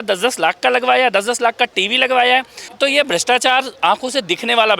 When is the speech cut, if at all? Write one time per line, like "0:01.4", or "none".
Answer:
0:02.6